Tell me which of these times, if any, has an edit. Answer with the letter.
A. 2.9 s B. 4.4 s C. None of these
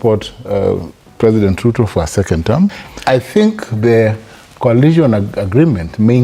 A